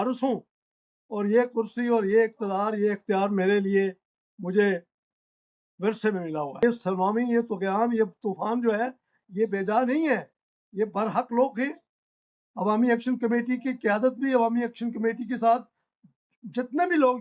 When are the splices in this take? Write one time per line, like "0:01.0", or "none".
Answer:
0:06.6